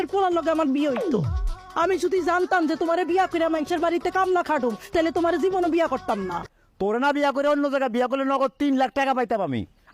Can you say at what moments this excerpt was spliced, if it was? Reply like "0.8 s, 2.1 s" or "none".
6.5 s